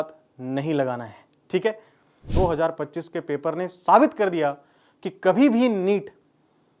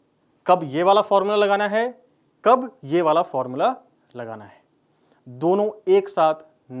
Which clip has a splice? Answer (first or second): first